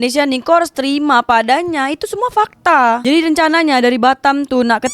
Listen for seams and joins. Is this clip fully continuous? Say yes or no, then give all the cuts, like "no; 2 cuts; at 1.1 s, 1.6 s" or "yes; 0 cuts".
no; 1 cut; at 3.0 s